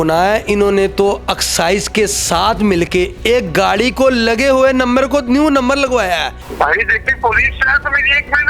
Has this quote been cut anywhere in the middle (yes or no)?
yes